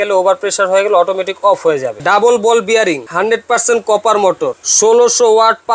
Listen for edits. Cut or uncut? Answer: cut